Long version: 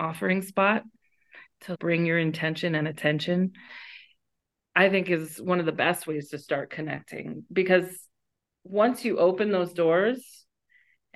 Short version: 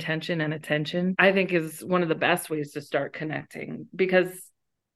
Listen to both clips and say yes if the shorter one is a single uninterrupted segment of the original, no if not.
no